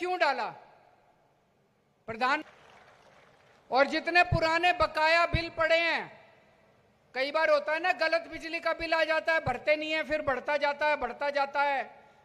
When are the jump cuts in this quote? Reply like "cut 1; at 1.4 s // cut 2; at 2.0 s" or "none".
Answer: cut 1; at 2.4 s